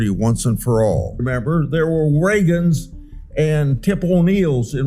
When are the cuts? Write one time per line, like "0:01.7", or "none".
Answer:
0:01.2

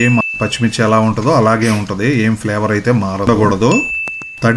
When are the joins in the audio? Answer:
0:03.3

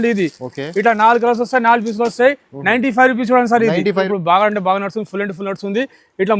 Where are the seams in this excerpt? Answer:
0:04.1

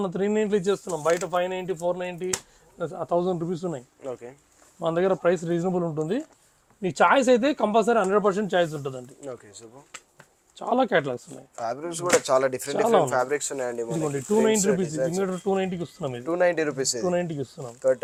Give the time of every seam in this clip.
none

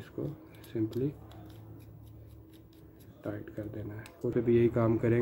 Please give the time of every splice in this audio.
0:04.3

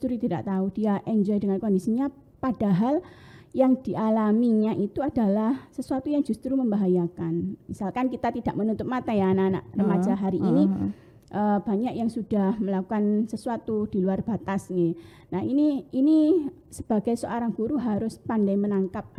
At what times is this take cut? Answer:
none

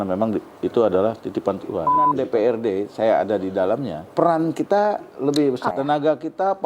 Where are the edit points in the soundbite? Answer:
0:02.1
0:04.0
0:05.7

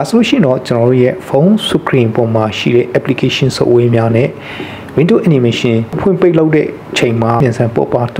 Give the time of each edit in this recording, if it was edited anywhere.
0:06.0
0:07.4

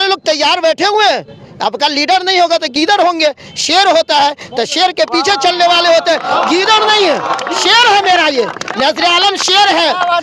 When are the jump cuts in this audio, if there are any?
none

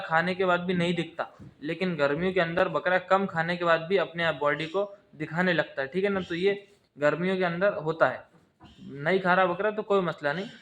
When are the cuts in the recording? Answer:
none

